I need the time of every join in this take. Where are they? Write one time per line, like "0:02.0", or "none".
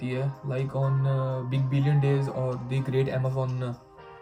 none